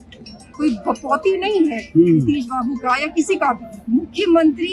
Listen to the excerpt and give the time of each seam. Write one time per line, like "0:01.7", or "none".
0:03.7